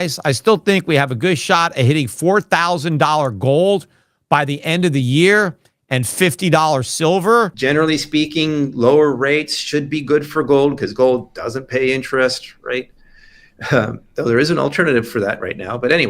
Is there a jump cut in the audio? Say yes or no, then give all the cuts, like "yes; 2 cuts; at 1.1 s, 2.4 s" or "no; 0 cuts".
yes; 1 cut; at 7.5 s